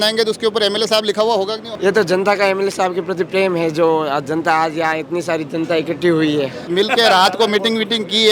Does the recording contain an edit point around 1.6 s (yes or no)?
yes